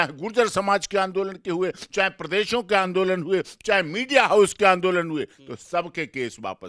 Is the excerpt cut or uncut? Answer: uncut